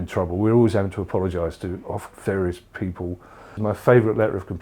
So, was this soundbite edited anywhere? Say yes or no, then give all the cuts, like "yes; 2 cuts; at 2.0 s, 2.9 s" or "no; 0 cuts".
yes; 1 cut; at 3.4 s